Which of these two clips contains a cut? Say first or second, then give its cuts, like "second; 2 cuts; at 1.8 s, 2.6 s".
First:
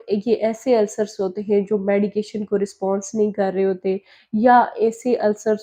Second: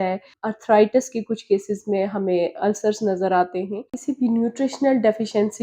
second; 1 cut; at 3.9 s